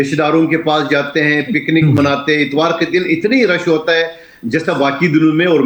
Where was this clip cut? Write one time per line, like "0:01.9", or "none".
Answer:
none